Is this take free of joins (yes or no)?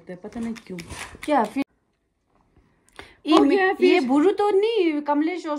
no